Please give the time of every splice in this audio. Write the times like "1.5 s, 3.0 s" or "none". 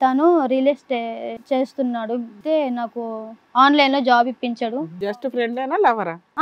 1.3 s, 2.4 s, 5.1 s